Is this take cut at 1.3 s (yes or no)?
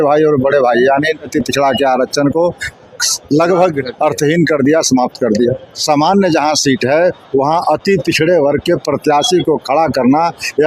yes